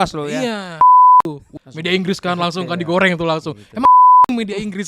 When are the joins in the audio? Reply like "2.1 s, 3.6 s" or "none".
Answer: 1.6 s

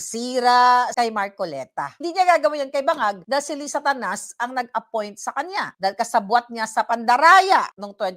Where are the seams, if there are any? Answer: 0.9 s, 3.2 s, 5.7 s

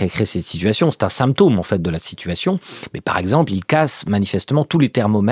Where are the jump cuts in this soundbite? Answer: none

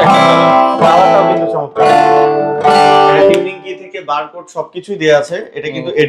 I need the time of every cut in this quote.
none

